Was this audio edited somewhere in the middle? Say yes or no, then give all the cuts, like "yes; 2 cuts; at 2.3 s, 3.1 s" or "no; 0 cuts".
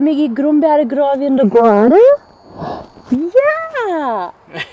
no; 0 cuts